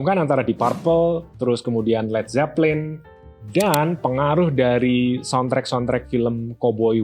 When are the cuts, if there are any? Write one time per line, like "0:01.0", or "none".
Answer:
none